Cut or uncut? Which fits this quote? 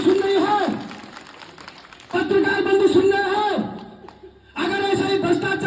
uncut